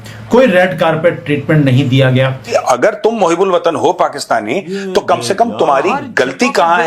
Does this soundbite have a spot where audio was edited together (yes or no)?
yes